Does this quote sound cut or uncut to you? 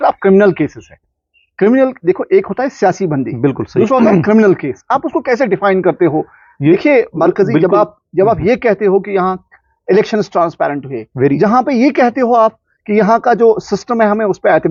uncut